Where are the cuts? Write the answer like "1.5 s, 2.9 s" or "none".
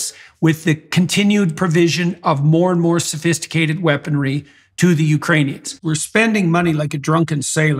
5.7 s